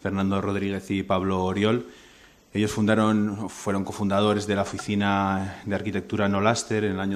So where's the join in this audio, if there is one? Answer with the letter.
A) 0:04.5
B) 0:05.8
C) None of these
C